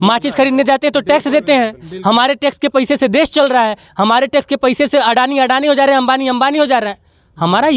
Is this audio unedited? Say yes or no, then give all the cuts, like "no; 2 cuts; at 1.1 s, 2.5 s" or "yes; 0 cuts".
yes; 0 cuts